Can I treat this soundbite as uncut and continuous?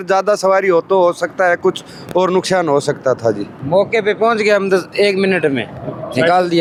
yes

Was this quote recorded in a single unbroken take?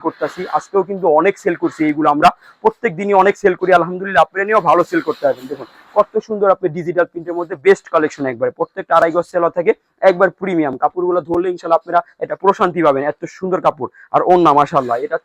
yes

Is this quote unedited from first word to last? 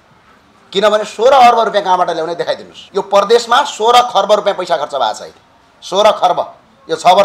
no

